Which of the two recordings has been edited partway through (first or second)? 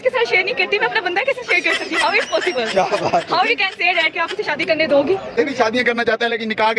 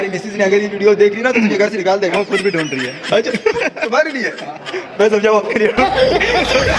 first